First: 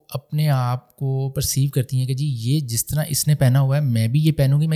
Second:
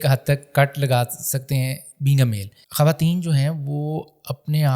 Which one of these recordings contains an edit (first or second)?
second